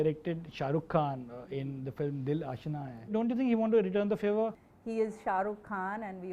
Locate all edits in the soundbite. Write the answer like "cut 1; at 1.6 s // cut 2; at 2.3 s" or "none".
cut 1; at 3.1 s // cut 2; at 4.6 s